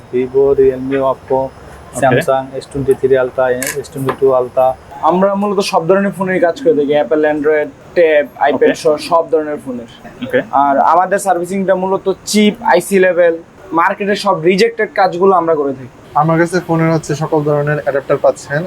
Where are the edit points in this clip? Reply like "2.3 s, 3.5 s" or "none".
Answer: 4.9 s, 10.0 s, 13.5 s, 16.0 s

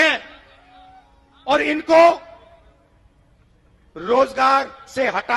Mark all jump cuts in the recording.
none

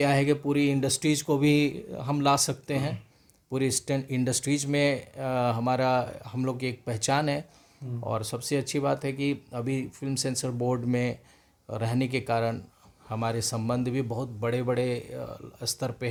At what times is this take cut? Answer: none

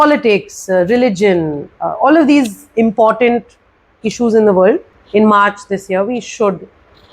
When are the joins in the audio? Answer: 4.9 s

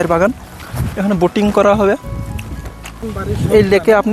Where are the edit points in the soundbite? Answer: none

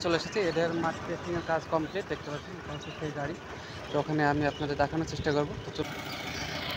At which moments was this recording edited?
3.9 s, 5.8 s

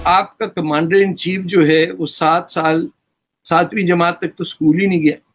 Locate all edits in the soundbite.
none

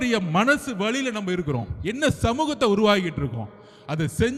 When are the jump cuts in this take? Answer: none

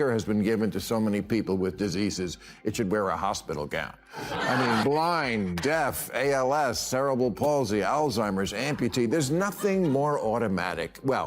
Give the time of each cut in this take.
4.8 s

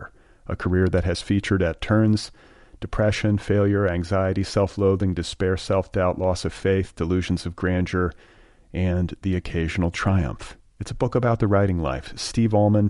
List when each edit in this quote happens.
none

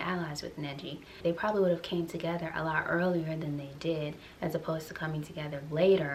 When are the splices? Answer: none

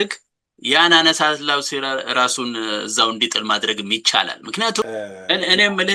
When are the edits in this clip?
4.8 s

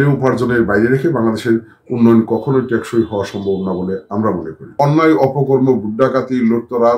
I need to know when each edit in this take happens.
4.8 s

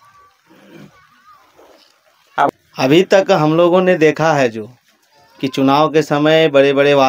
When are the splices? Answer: 2.5 s

